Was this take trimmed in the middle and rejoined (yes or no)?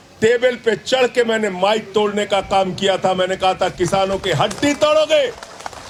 no